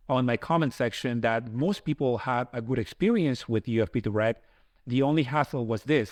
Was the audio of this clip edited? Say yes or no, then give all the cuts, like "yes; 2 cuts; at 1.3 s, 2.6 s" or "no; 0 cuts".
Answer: no; 0 cuts